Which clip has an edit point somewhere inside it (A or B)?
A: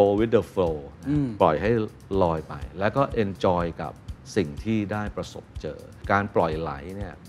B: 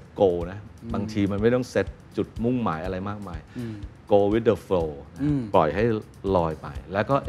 A